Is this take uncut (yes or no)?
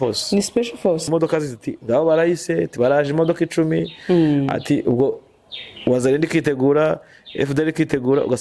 no